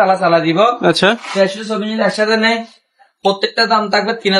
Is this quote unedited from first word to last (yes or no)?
yes